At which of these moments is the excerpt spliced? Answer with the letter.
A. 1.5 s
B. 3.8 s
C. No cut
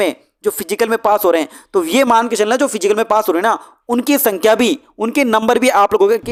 C